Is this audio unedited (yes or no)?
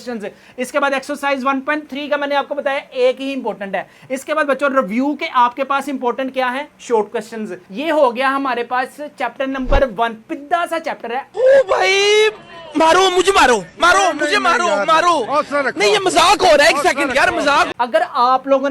yes